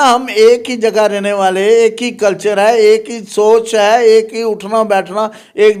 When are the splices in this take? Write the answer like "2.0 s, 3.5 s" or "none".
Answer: none